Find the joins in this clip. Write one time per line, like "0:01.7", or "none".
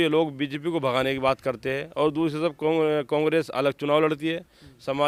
none